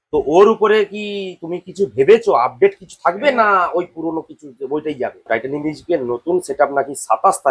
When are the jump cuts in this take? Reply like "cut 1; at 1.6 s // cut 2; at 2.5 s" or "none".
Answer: cut 1; at 5.3 s